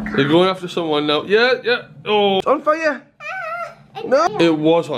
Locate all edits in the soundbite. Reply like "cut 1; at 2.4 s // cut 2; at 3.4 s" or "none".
cut 1; at 2.4 s // cut 2; at 4.3 s

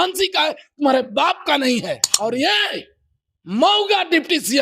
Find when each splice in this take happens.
cut 1; at 2.1 s

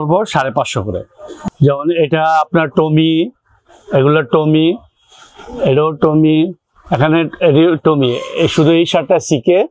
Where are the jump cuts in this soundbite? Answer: cut 1; at 1.4 s

